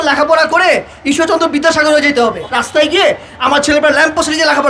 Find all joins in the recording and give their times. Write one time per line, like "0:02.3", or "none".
0:02.6